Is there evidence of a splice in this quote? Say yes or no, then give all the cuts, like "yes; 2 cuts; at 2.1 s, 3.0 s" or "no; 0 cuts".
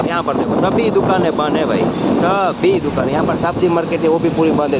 no; 0 cuts